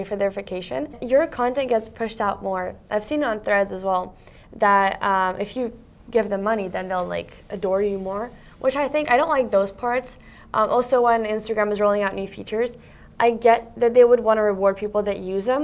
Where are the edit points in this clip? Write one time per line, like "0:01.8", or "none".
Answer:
0:01.0